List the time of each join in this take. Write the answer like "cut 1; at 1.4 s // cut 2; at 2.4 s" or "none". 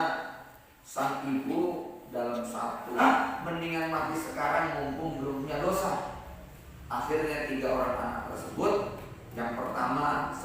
cut 1; at 3.0 s